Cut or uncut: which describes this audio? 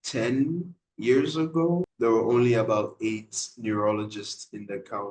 cut